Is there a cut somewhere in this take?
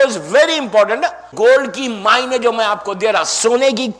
yes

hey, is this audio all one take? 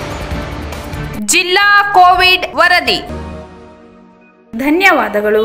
yes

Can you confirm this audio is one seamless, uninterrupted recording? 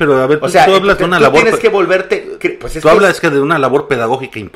yes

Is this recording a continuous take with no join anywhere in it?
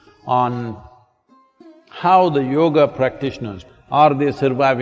no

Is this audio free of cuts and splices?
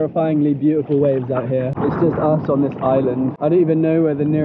no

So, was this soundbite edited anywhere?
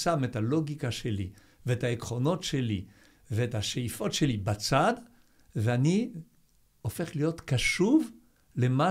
no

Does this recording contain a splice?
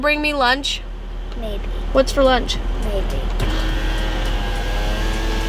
no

